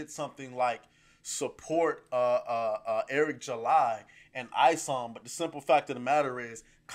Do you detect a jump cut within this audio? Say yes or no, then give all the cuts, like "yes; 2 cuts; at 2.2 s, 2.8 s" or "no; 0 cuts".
no; 0 cuts